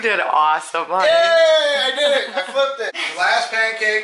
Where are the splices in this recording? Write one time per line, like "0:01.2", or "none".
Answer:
0:03.0

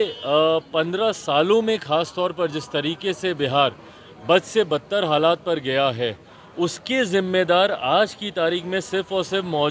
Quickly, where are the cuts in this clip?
none

